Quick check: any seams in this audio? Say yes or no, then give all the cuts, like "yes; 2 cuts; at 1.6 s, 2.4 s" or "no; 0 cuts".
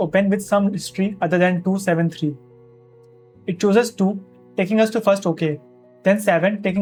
no; 0 cuts